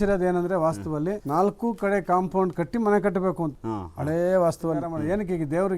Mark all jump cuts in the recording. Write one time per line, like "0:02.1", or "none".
0:01.2
0:03.6
0:04.9